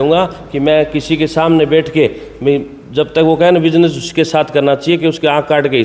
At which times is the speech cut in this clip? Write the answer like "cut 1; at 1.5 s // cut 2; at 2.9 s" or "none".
none